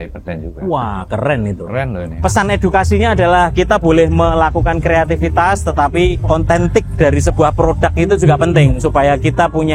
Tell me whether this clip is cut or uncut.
cut